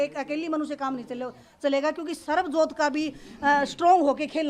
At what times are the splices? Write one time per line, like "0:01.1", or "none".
none

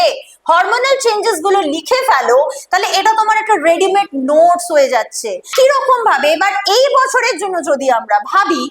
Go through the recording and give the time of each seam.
0:05.4

